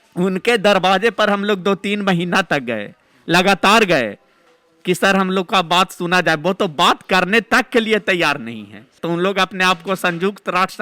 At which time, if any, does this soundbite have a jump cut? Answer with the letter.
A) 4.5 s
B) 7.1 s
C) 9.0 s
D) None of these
C